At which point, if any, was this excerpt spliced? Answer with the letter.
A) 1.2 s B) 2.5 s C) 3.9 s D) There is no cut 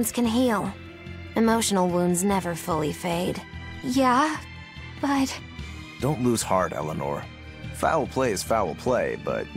B